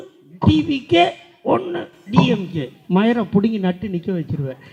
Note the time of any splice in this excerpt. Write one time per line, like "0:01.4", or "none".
none